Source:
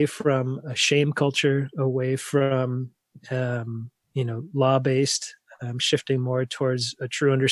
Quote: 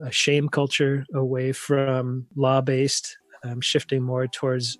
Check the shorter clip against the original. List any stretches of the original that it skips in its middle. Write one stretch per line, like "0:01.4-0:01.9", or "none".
0:02.9-0:04.4